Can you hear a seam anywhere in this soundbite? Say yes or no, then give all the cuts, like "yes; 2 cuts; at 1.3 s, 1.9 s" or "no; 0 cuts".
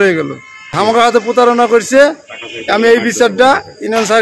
yes; 1 cut; at 0.9 s